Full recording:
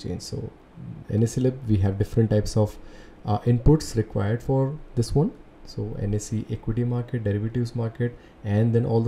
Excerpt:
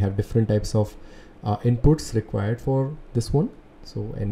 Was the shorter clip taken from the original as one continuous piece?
yes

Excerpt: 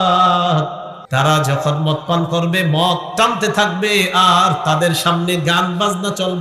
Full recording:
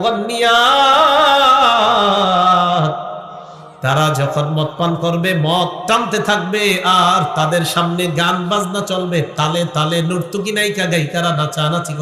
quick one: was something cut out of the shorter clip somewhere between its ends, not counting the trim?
yes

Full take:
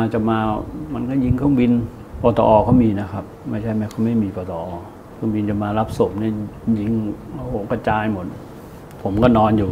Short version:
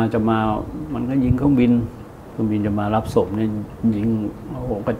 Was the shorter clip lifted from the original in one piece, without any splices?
no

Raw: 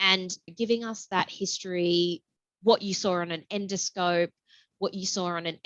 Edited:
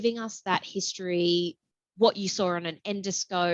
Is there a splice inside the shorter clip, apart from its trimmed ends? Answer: no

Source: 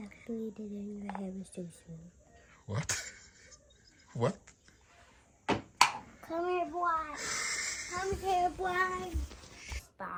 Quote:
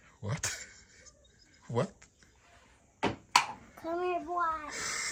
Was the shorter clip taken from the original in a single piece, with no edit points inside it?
yes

